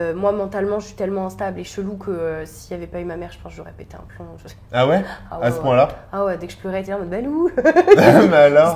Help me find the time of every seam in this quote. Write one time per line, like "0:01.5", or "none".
none